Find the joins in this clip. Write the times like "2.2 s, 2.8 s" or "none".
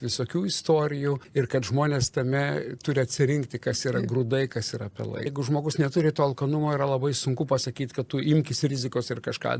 1.2 s, 5.3 s